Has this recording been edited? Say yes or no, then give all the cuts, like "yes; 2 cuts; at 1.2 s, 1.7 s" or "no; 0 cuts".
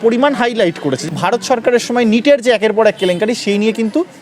yes; 1 cut; at 1.0 s